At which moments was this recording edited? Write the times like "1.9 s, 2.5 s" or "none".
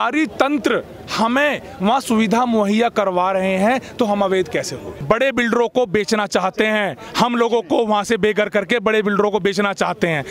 4.9 s